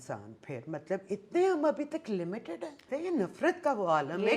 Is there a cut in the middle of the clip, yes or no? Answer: yes